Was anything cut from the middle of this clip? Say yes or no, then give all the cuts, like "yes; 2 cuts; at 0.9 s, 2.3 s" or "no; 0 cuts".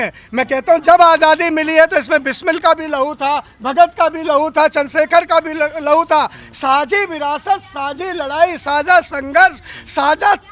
no; 0 cuts